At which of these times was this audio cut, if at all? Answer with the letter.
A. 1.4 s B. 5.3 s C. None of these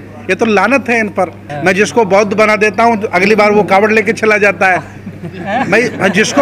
A